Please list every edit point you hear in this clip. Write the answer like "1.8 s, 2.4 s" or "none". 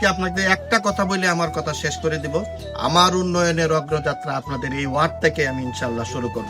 2.6 s